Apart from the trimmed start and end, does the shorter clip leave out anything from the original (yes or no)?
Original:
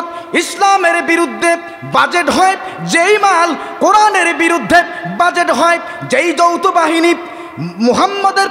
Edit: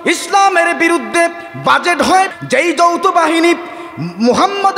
yes